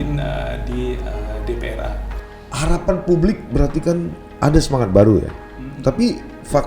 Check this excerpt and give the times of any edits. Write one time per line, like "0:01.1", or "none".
0:02.1

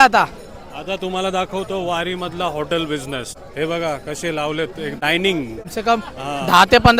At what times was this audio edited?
0:03.4
0:05.0
0:05.7

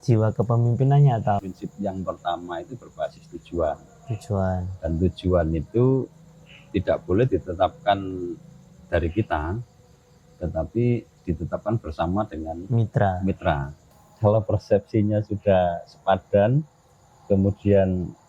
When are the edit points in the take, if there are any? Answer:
0:01.6
0:14.0

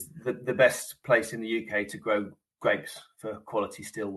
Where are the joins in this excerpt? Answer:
none

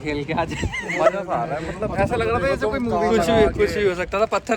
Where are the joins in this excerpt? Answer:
none

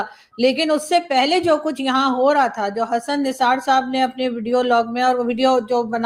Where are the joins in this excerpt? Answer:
none

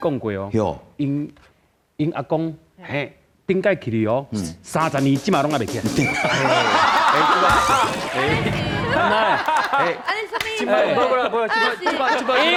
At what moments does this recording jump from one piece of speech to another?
none

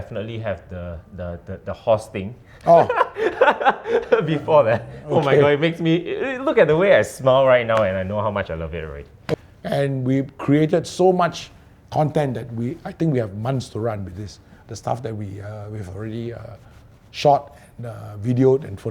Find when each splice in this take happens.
0:09.3

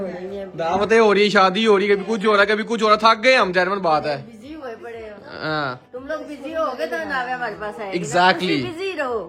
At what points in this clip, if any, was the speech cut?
none

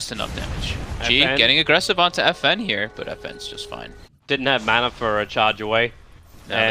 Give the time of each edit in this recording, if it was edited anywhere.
0:01.8

